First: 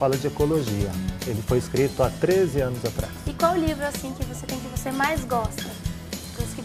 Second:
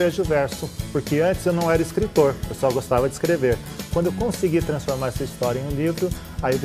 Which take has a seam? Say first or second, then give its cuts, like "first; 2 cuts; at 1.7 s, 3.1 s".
first; 1 cut; at 1.9 s